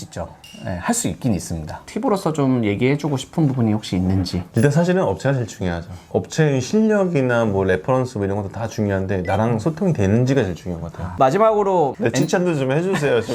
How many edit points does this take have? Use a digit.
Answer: 3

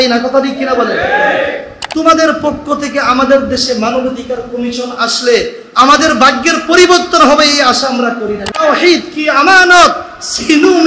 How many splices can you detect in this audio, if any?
2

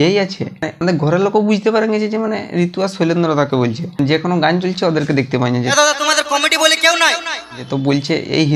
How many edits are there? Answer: 0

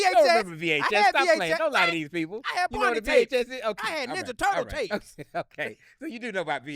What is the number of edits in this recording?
0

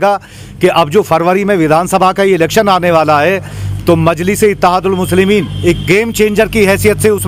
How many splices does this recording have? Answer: 0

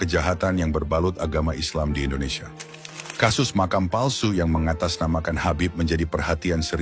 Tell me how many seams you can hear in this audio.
0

